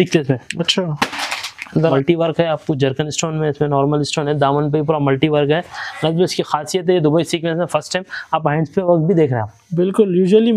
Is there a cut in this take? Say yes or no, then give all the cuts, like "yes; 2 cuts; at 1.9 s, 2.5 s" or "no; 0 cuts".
yes; 1 cut; at 1.9 s